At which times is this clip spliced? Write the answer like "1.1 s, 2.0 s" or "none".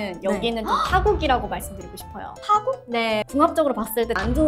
3.2 s